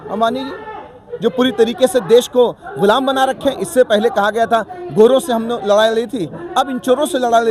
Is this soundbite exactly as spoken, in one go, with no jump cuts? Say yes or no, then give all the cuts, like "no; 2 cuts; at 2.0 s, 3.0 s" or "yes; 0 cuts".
yes; 0 cuts